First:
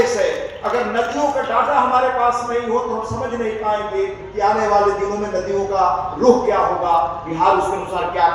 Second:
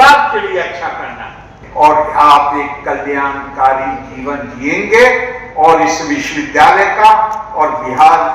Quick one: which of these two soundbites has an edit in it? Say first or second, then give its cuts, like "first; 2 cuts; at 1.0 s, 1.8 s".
second; 1 cut; at 1.6 s